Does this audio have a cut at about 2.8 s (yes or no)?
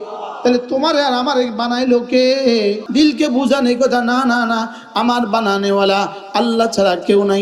yes